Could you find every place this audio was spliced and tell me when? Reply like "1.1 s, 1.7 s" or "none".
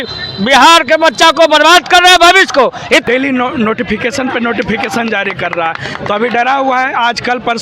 3.0 s